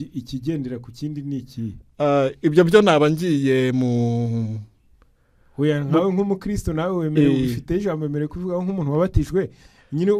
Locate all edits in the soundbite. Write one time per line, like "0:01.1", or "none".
none